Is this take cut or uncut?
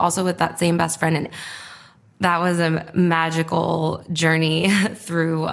cut